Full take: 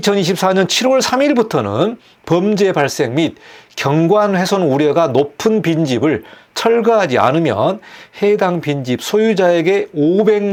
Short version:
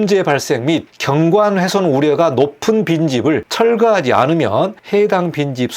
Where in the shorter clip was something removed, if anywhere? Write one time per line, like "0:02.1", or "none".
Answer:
0:00.9
0:03.5
0:04.8